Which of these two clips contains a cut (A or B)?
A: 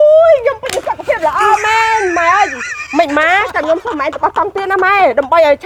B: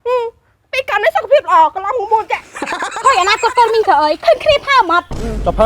B